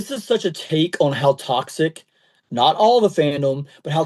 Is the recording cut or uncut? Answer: uncut